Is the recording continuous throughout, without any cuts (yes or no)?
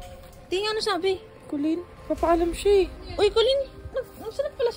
no